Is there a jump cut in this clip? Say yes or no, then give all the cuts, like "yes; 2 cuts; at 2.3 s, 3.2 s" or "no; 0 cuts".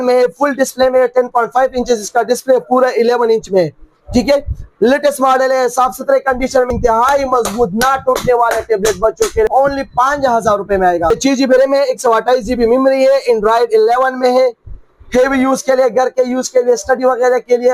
yes; 3 cuts; at 6.7 s, 9.5 s, 11.1 s